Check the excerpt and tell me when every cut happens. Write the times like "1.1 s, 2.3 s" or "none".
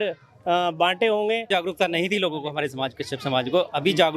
1.5 s

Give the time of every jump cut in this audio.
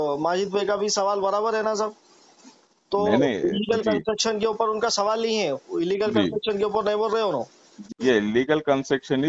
7.8 s

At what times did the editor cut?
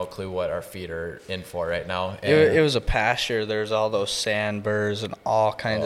none

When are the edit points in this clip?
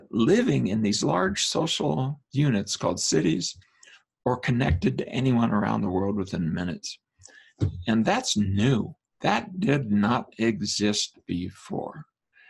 2.2 s

